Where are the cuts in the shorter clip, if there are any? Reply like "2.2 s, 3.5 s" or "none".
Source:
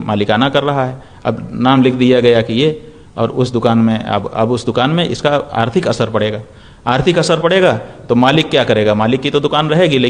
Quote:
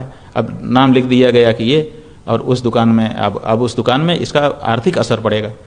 none